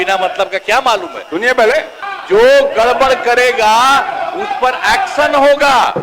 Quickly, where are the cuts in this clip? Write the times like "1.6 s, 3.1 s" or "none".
2.0 s